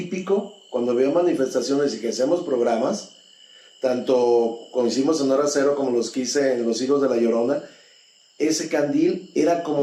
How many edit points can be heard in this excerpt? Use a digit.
0